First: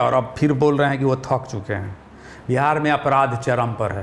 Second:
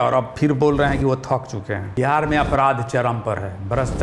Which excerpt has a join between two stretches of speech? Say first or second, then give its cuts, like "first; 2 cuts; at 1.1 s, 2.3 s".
second; 1 cut; at 1.8 s